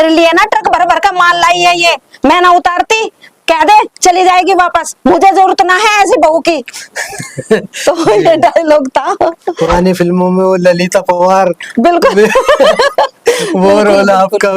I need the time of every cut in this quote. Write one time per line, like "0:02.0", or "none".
0:09.5